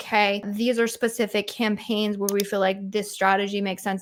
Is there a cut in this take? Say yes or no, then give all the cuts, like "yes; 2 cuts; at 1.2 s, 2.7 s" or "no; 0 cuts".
no; 0 cuts